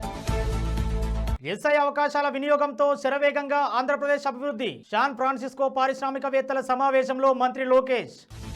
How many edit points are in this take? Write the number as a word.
one